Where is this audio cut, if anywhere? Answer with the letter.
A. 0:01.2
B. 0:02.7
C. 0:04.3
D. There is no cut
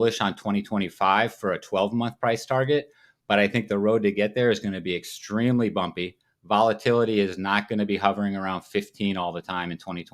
D